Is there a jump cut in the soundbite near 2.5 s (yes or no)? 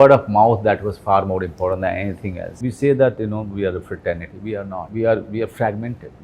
yes